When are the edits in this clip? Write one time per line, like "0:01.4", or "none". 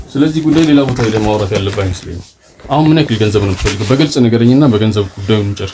none